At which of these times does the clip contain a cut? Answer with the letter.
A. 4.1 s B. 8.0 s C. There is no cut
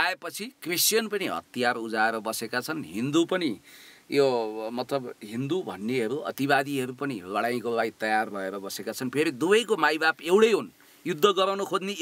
C